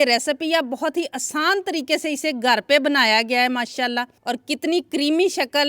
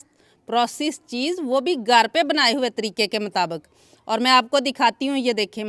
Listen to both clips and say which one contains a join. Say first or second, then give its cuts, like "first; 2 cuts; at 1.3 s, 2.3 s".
first; 1 cut; at 4.1 s